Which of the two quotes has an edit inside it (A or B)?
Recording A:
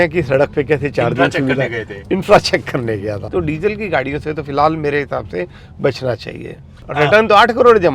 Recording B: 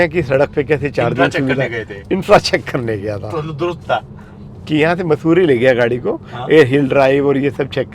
A